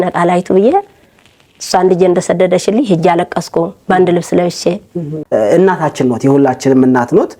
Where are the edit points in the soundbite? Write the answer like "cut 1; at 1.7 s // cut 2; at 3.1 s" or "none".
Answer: cut 1; at 5.1 s